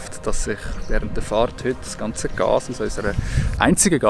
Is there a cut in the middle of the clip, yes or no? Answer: no